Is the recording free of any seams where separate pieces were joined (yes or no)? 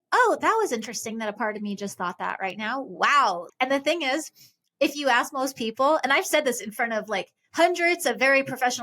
no